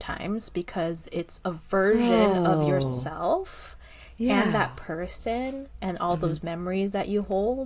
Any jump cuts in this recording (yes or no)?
no